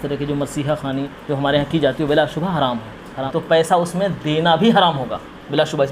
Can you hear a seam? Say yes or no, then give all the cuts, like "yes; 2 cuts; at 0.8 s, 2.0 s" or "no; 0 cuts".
yes; 1 cut; at 3.3 s